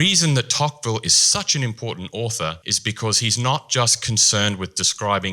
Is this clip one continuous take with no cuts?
no; 1 cut; at 2.7 s

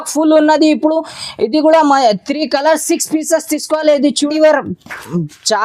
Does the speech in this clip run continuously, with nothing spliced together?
no; 1 cut; at 4.3 s

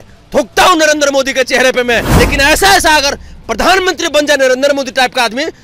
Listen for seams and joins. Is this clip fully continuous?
no; 1 cut; at 2.1 s

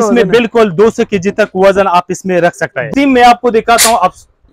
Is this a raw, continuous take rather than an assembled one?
no; 1 cut; at 2.9 s

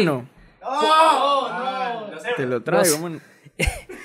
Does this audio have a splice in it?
no; 0 cuts

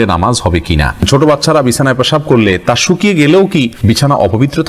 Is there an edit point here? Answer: yes; 2 cuts; at 1.0 s, 3.7 s

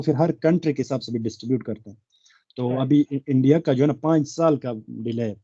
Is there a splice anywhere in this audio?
no; 0 cuts

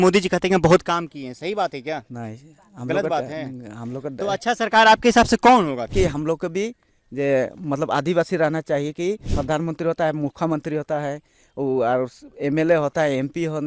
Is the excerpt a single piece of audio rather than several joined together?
no; 2 cuts; at 5.9 s, 9.3 s

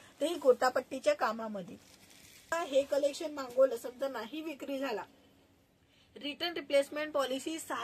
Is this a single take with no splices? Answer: no; 1 cut; at 2.6 s

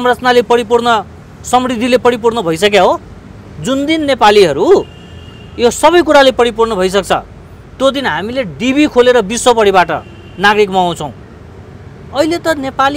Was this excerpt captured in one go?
yes; 0 cuts

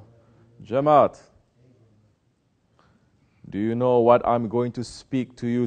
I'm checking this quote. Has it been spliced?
yes; 1 cut; at 3.9 s

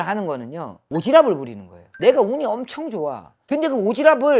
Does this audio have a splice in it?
yes; 1 cut; at 1.8 s

